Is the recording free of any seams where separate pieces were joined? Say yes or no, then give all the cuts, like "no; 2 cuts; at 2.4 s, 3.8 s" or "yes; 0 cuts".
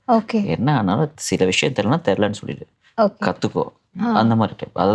yes; 0 cuts